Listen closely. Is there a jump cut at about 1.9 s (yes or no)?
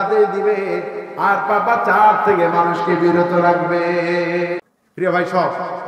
no